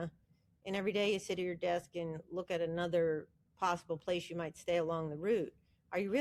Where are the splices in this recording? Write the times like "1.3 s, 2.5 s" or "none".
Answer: none